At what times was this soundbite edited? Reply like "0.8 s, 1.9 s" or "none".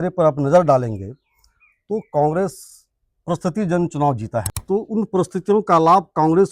4.5 s